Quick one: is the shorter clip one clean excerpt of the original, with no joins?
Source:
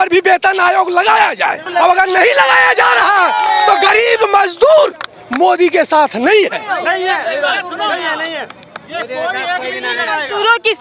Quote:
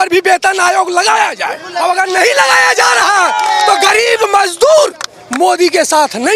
yes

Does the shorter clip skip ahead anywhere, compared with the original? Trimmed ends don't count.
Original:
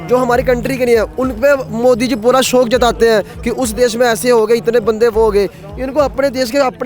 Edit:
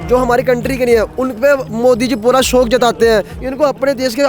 yes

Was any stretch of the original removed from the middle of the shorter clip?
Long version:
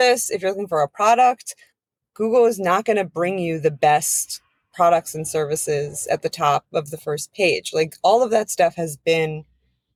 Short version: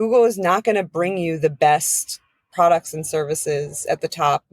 no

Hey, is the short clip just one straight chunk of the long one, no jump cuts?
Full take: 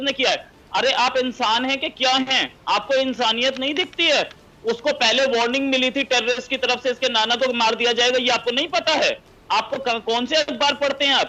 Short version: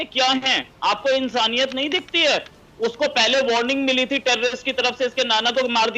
yes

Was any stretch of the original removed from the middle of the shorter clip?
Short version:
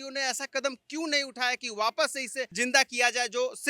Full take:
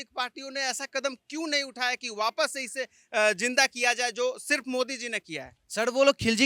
yes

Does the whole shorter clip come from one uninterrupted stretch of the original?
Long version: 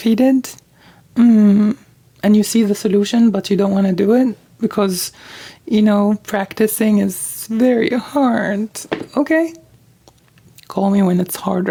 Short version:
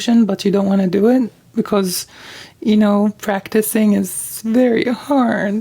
yes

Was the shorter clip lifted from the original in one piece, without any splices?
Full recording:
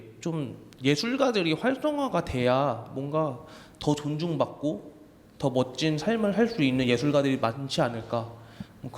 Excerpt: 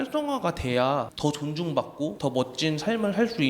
no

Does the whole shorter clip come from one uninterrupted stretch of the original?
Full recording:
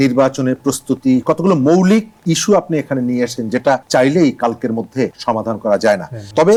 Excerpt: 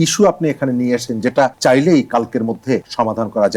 yes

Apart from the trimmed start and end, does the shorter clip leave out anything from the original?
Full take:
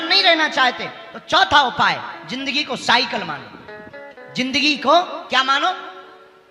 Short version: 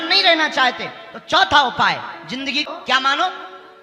yes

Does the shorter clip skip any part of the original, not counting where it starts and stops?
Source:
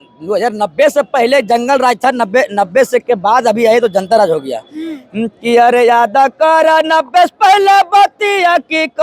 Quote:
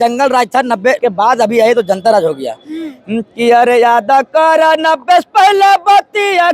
yes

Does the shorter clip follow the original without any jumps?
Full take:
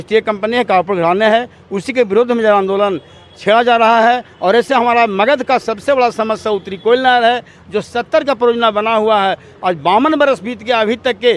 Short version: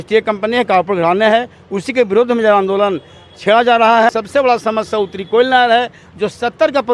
no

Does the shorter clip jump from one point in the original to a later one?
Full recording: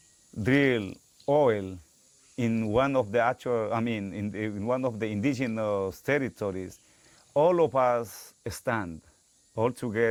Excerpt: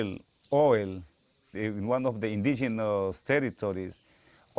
yes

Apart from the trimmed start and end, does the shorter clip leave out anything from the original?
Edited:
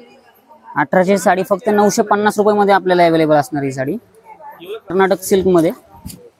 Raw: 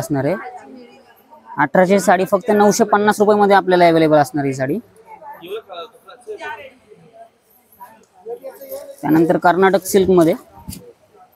yes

